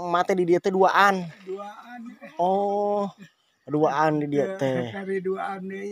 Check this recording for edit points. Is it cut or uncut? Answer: uncut